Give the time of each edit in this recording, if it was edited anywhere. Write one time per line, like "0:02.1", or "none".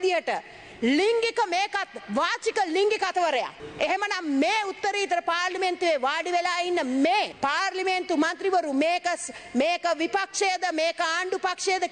0:03.6
0:07.3